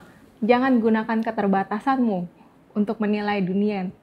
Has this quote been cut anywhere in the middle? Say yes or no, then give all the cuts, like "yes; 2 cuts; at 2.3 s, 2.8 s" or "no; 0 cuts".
no; 0 cuts